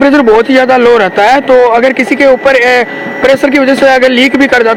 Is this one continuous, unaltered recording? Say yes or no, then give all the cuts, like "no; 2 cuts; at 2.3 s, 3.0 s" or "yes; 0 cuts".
yes; 0 cuts